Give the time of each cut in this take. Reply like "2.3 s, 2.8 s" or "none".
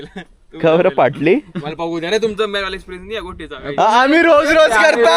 none